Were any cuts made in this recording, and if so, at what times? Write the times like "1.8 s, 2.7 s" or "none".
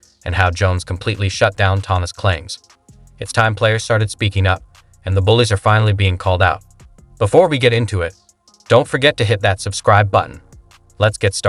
2.7 s